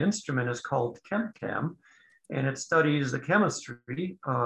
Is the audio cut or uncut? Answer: uncut